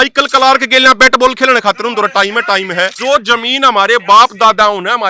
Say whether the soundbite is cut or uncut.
cut